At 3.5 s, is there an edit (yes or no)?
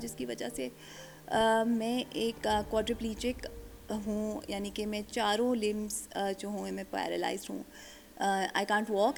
no